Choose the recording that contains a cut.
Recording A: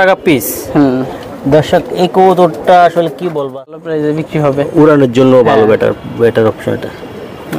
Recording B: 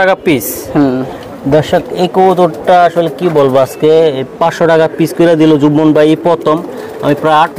A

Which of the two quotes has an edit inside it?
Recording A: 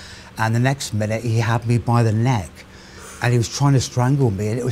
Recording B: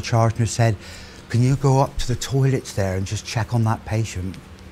A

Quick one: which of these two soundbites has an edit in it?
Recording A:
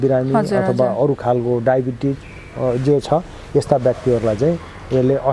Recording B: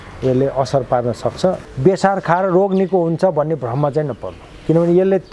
B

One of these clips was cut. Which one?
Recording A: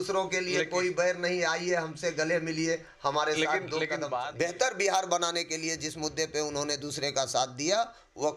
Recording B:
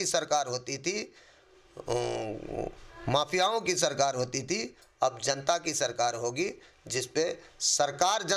A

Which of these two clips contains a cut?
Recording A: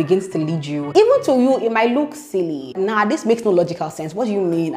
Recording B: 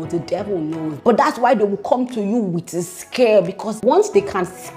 B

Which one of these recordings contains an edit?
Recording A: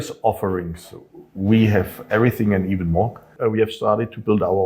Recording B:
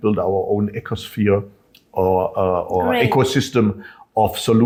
A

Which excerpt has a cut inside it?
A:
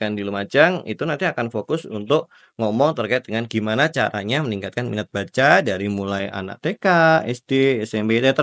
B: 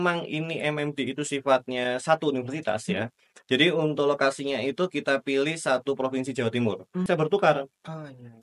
B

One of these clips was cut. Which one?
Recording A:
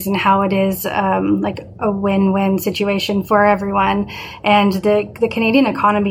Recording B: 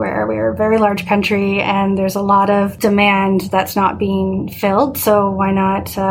B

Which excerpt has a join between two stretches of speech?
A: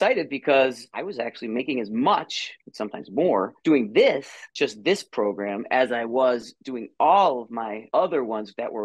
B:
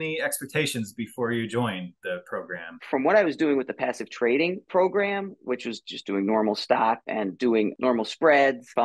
B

